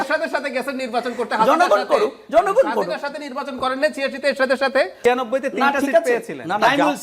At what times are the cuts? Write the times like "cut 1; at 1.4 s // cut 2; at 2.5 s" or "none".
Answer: cut 1; at 5.0 s